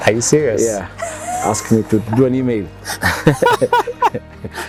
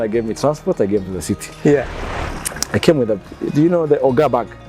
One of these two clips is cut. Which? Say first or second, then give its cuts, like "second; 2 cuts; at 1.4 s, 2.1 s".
second; 1 cut; at 1.9 s